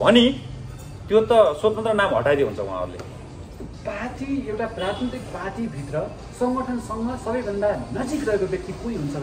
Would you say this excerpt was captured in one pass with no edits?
yes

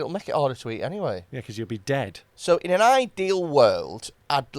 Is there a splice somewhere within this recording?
yes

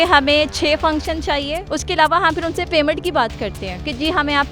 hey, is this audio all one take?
yes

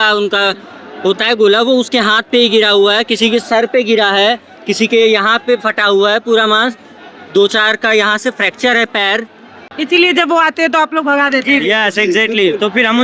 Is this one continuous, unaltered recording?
no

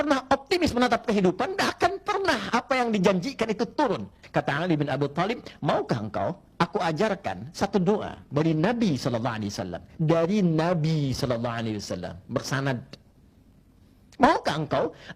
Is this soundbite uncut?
no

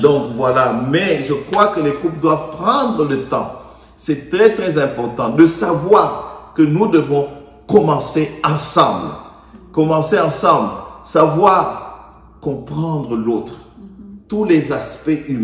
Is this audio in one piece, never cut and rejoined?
yes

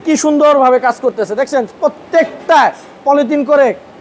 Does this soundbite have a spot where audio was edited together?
no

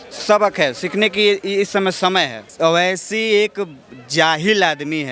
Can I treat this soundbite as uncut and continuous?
no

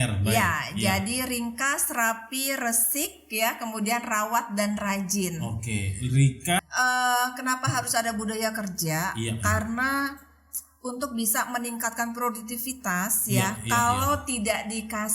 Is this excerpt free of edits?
no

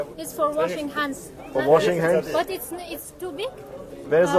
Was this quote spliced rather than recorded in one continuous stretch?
no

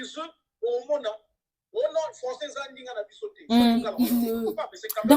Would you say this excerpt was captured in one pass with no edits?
no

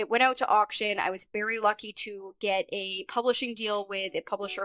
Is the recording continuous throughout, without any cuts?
yes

